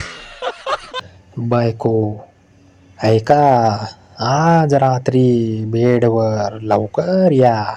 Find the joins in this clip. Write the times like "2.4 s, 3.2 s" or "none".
1.0 s